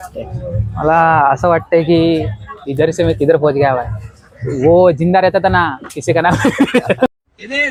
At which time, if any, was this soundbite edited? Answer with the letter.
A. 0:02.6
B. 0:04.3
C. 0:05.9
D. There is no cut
D